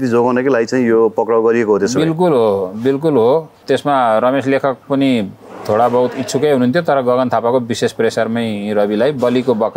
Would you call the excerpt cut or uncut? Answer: cut